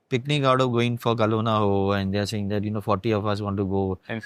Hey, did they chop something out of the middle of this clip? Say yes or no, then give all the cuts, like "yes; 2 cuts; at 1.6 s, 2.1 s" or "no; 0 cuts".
no; 0 cuts